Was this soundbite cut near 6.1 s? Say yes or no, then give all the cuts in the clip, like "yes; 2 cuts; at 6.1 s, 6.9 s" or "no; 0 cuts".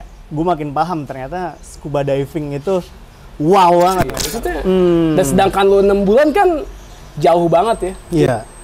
no; 1 cut; at 4.3 s